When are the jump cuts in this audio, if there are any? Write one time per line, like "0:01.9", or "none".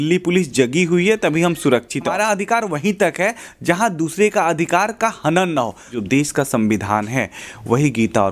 0:02.1
0:05.9